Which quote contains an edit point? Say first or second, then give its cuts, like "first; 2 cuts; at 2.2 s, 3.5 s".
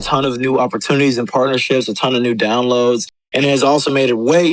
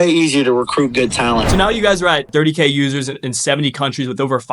second; 2 cuts; at 1.5 s, 2.3 s